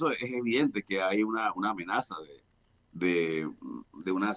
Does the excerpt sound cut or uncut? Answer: uncut